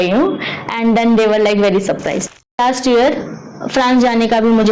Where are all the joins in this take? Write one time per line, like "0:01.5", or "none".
0:02.6